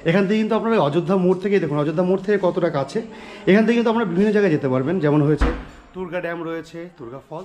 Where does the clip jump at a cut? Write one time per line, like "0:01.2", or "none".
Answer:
none